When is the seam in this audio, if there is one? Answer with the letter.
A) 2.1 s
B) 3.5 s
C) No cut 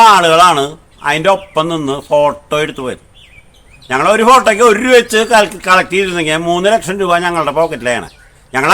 C